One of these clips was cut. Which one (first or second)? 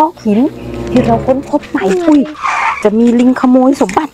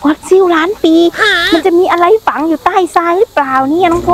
first